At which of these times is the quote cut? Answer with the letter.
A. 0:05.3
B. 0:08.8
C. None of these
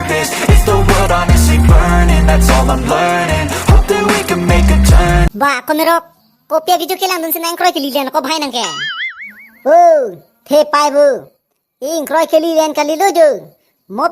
A